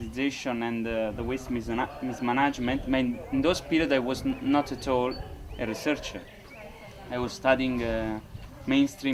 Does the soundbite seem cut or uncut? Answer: uncut